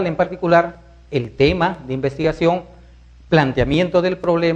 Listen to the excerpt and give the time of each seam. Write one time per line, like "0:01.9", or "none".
0:03.6